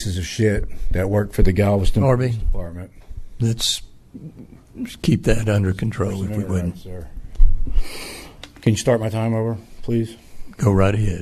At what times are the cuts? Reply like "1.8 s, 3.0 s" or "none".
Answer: none